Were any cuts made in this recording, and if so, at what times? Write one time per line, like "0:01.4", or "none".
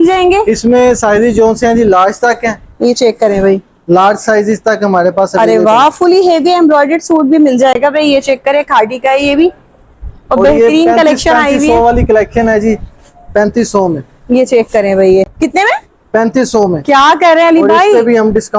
none

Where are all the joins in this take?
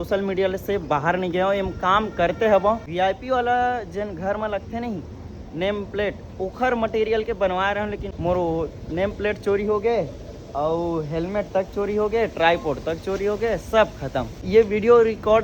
0:02.9
0:08.1
0:14.4

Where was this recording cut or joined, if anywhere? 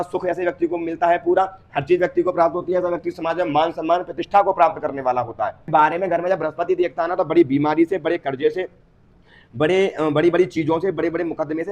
0:05.7

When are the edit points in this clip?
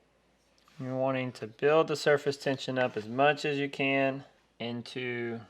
0:04.4

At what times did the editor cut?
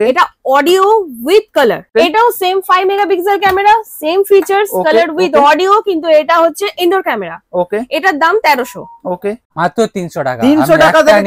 0:01.9
0:09.6

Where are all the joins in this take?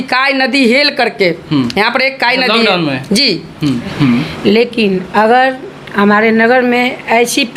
0:03.9

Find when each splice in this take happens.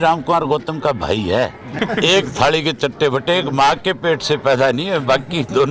0:01.8

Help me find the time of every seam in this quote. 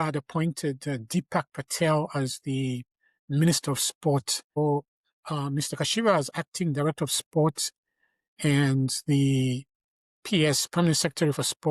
0:04.6

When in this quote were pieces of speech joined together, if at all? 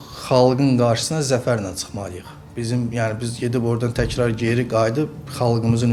none

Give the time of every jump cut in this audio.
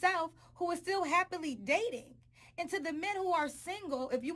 none

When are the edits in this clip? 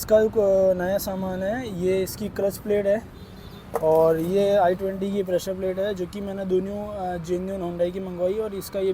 none

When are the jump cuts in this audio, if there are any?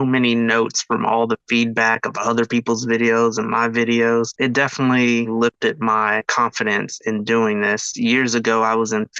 0:04.3
0:06.2
0:07.9

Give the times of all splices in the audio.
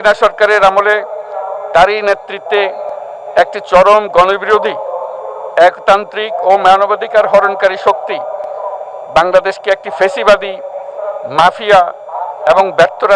none

